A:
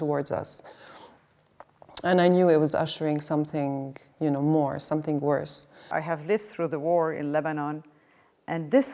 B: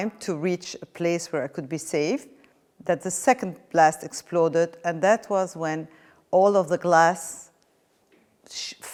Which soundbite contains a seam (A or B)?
A